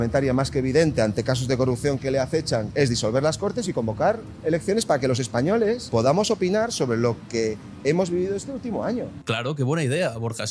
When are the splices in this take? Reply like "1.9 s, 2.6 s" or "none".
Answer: 2.7 s, 5.8 s

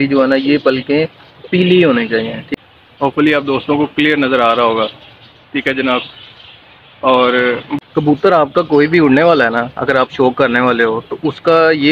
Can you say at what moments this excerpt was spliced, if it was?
2.4 s, 7.9 s

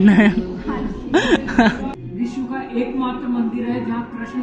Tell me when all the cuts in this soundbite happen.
2.0 s

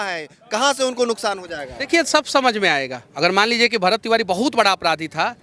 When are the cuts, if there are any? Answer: 1.9 s, 3.0 s

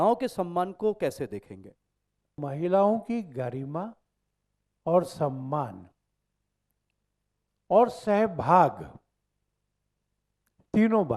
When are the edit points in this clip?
2.4 s

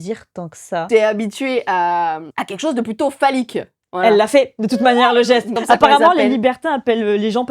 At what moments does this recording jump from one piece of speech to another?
0.9 s, 2.3 s, 5.5 s

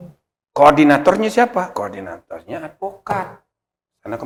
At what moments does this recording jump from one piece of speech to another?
none

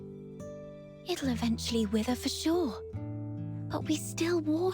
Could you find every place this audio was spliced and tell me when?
0.9 s

